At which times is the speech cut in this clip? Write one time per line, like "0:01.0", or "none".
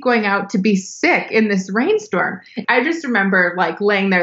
0:02.6